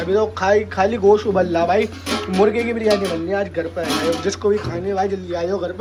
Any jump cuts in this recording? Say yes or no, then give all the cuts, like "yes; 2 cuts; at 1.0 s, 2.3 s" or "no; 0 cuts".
no; 0 cuts